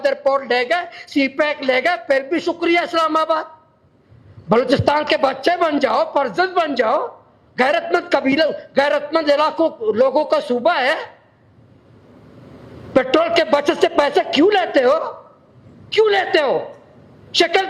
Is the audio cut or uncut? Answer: uncut